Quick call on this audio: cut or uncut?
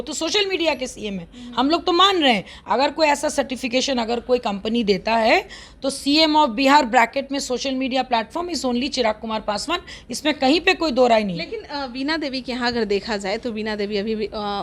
uncut